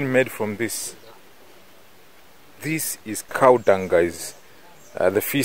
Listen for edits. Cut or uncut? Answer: cut